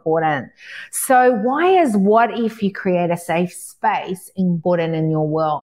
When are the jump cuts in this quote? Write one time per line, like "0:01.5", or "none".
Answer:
0:04.6